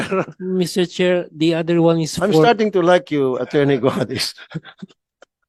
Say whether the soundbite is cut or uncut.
uncut